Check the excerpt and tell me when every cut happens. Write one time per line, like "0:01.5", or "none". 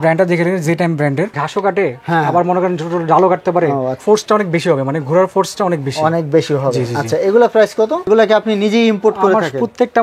0:01.4
0:04.0
0:08.1